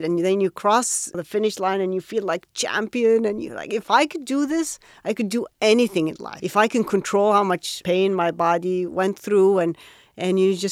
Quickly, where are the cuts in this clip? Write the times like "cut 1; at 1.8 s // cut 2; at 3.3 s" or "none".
cut 1; at 1.2 s // cut 2; at 6.3 s // cut 3; at 7.7 s